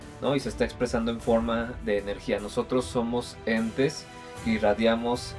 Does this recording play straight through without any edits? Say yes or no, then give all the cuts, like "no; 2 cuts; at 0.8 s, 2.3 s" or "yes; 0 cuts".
yes; 0 cuts